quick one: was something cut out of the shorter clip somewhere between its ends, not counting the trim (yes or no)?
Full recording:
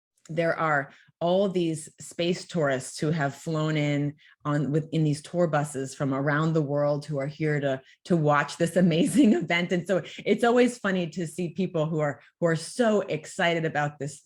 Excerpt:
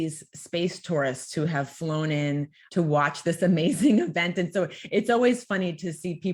yes